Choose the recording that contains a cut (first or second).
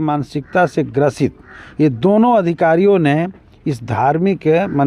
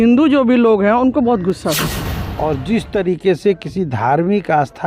second